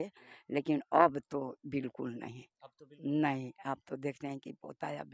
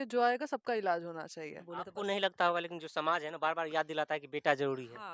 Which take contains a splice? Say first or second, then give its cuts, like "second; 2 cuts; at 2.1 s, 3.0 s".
second; 1 cut; at 1.6 s